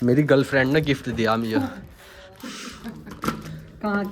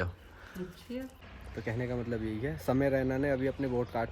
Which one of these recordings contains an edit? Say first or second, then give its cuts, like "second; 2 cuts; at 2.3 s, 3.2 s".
second; 1 cut; at 1.3 s